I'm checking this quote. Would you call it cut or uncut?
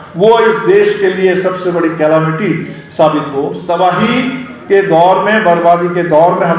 cut